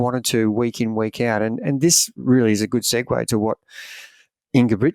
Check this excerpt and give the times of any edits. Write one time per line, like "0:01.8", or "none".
none